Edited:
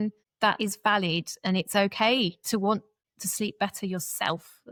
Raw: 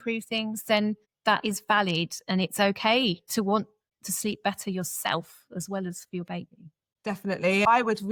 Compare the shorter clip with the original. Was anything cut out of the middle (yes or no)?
no